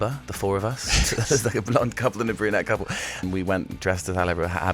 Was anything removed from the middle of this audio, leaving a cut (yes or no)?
yes